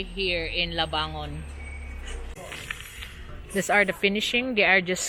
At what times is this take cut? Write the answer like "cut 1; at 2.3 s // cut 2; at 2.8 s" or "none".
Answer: cut 1; at 2.2 s